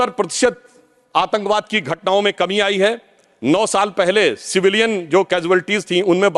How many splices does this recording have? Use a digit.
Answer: 0